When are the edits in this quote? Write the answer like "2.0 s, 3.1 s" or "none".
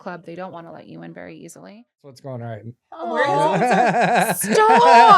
2.2 s